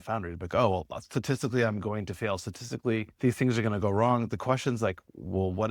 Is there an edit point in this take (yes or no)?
no